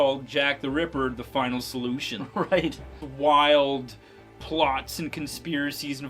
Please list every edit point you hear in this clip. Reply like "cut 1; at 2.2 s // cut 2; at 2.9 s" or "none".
cut 1; at 3.0 s

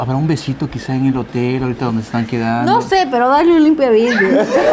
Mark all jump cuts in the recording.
none

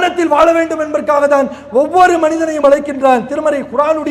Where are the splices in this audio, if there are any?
none

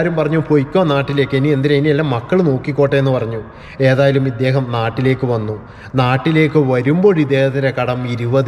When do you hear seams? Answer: none

